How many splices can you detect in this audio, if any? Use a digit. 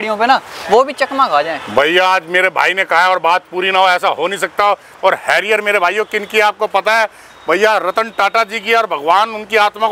0